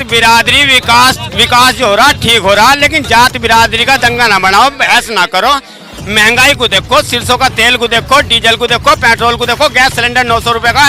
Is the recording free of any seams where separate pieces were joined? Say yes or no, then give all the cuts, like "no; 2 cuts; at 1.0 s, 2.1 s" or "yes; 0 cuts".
yes; 0 cuts